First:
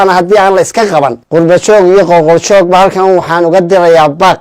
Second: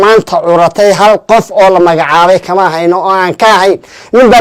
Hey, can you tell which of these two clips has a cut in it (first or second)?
first